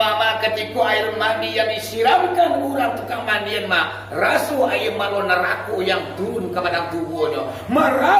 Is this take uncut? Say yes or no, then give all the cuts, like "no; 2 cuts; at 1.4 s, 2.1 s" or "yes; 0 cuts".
yes; 0 cuts